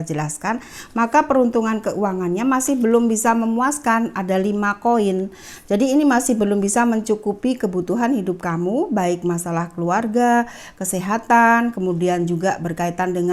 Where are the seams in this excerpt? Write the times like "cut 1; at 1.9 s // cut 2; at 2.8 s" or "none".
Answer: none